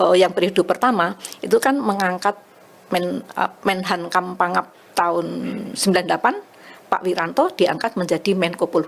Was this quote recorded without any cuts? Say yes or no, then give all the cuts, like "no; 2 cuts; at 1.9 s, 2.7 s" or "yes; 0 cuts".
yes; 0 cuts